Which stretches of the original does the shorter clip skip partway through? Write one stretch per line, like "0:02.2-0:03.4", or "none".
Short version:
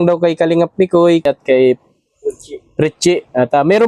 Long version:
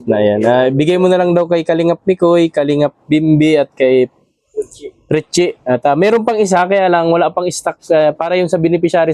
0:02.5-0:03.6